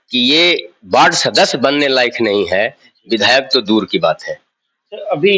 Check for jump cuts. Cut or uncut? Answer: uncut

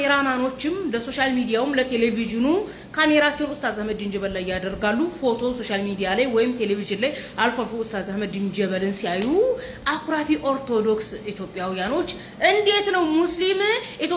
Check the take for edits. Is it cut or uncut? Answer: uncut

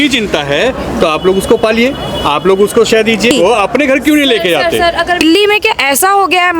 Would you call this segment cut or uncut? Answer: cut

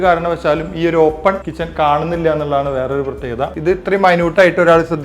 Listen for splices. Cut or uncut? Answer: cut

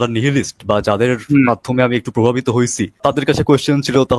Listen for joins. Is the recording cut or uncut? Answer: cut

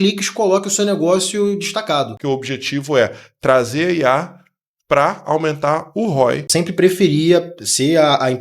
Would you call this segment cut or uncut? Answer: cut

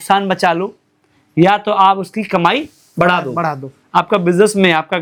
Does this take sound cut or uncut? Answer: uncut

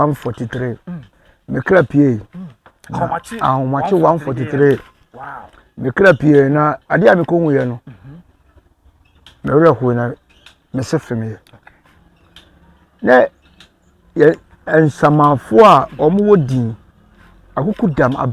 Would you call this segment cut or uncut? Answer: uncut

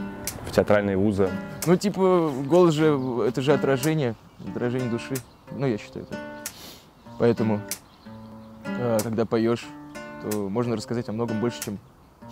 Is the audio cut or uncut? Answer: cut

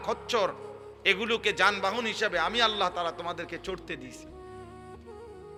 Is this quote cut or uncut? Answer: uncut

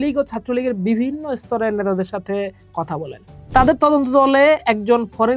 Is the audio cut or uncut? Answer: cut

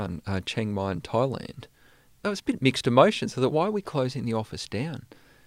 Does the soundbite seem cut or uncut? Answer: cut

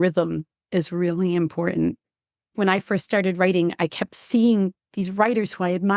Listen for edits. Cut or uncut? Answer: cut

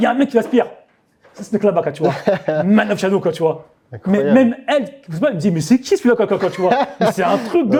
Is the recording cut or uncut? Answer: uncut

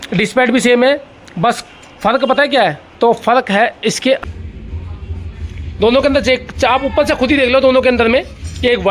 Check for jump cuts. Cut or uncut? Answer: cut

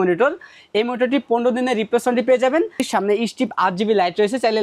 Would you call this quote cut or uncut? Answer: cut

